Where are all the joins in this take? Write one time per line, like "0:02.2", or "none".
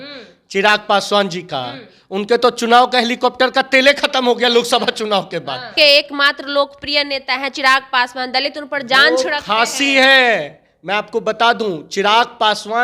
0:05.7